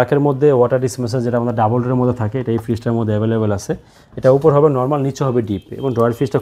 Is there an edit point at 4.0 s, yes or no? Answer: no